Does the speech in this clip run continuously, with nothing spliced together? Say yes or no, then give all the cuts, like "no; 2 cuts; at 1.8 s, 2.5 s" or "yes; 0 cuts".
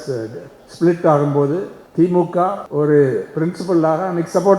no; 2 cuts; at 1.8 s, 2.6 s